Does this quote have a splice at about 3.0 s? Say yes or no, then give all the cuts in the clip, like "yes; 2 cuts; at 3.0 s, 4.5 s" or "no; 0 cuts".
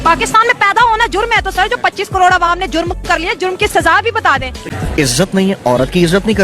no; 1 cut; at 4.6 s